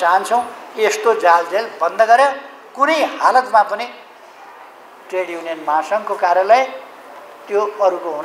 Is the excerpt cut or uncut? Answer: uncut